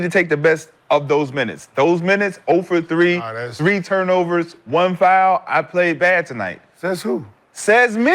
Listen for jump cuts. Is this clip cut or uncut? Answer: uncut